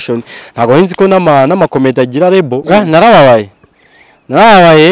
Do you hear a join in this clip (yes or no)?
yes